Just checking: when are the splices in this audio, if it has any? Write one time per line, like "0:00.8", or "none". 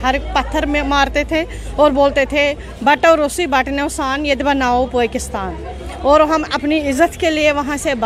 none